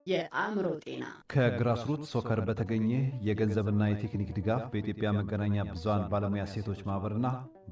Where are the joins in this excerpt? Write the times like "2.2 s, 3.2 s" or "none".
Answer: 1.2 s